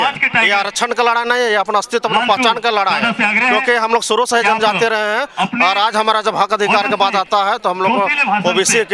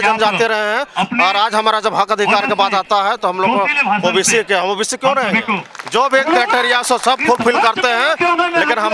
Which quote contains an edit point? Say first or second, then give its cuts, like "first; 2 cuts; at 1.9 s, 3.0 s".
second; 1 cut; at 5.7 s